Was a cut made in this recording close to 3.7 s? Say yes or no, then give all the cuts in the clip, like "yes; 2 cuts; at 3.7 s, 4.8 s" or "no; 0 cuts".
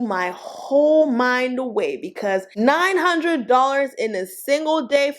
no; 1 cut; at 2.5 s